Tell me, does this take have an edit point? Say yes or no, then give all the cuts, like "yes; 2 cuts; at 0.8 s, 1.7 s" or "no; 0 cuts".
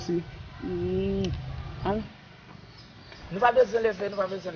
no; 0 cuts